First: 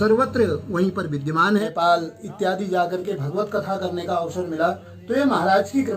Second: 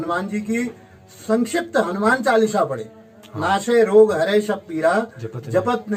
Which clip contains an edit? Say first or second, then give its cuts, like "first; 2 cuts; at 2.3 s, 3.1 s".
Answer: first; 1 cut; at 1.6 s